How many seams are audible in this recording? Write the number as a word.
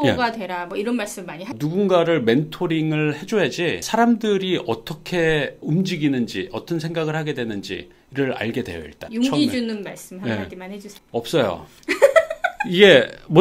two